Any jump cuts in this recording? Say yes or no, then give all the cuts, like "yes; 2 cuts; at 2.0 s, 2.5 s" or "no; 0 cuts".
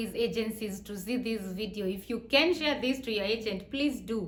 no; 0 cuts